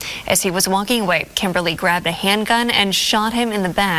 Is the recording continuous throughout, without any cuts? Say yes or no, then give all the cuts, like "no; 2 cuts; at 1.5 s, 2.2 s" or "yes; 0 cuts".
yes; 0 cuts